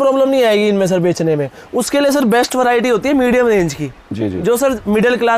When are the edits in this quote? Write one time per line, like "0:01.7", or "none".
none